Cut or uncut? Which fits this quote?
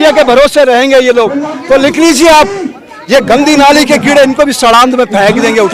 uncut